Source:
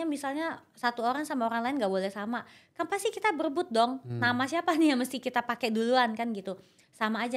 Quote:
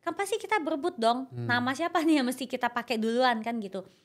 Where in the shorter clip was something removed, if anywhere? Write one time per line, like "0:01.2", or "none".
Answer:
none

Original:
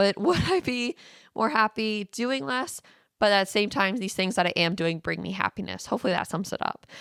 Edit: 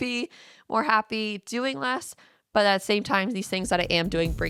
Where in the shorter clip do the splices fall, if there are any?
none

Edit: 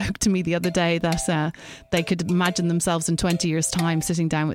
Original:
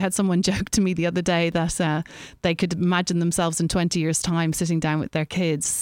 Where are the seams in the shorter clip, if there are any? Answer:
none

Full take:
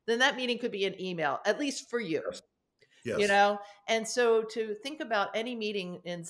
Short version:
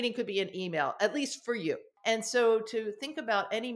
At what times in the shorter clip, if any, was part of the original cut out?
0:01.9

